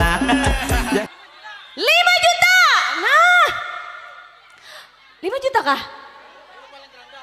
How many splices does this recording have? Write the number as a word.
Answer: one